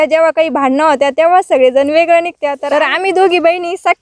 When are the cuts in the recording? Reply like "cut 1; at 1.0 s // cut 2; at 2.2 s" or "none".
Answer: cut 1; at 2.5 s

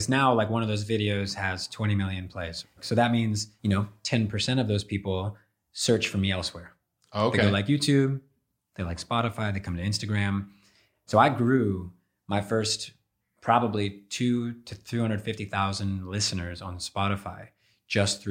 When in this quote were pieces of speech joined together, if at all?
cut 1; at 2.7 s // cut 2; at 3.5 s // cut 3; at 11.0 s

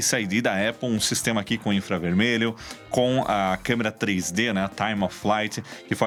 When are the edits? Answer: none

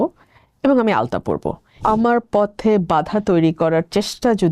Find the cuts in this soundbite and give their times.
cut 1; at 1.8 s

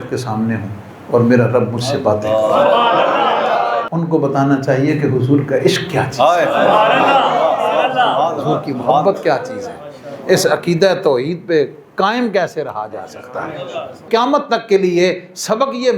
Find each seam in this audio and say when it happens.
cut 1; at 3.9 s // cut 2; at 14.0 s

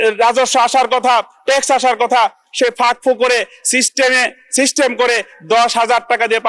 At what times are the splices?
none

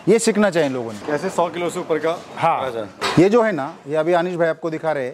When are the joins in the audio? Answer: cut 1; at 1.0 s // cut 2; at 2.9 s

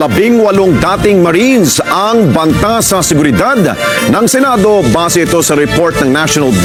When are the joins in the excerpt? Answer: none

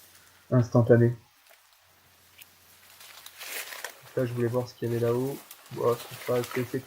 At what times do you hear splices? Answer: cut 1; at 3.3 s

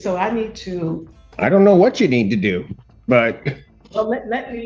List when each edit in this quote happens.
cut 1; at 3.7 s

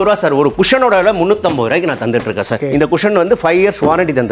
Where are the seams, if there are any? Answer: cut 1; at 2.5 s

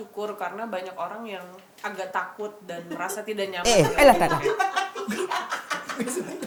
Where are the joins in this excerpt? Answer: none

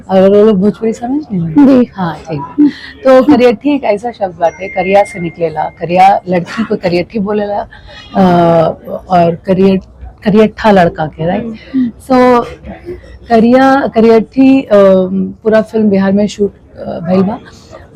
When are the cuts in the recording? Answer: none

